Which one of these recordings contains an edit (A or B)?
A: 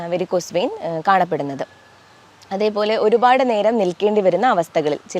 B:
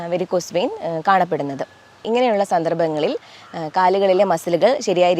B